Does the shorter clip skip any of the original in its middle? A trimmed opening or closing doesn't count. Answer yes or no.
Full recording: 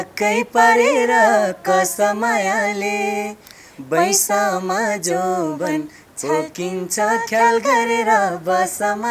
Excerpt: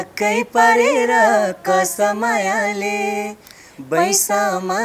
no